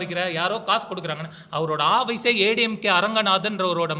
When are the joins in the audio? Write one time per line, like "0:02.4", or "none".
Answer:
none